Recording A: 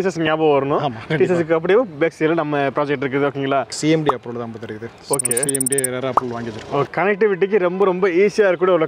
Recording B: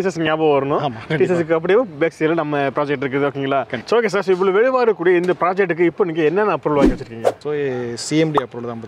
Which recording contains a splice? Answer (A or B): A